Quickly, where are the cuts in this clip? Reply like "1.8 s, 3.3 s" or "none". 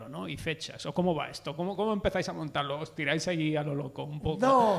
none

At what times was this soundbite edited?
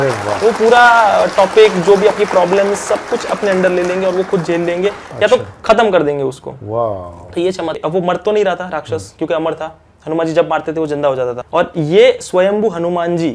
7.8 s, 11.4 s

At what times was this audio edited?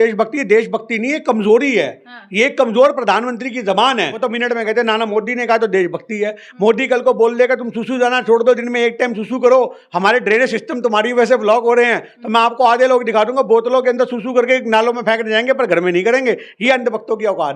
4.1 s

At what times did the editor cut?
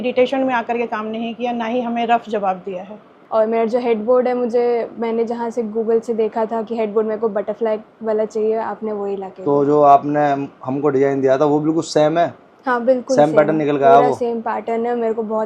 3.1 s

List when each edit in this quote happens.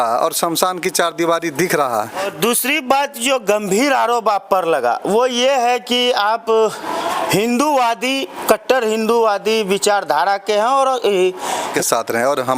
2.3 s, 11.7 s

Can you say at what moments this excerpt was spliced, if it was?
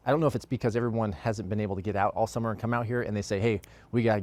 none

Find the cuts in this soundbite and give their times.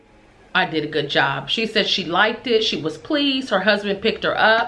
none

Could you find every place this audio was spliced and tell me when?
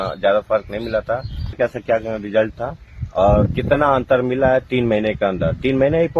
1.5 s

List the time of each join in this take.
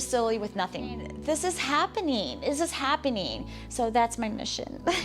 0.9 s

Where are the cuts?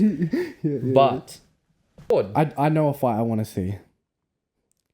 2.1 s

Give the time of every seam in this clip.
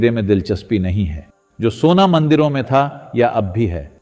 none

